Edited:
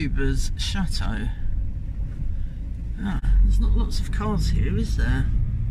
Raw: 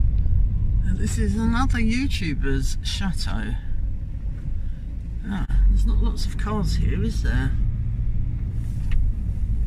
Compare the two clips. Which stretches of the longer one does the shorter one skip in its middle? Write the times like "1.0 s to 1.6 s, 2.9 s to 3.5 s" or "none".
none